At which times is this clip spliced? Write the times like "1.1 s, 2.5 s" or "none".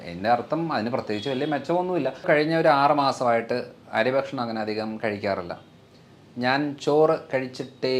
2.2 s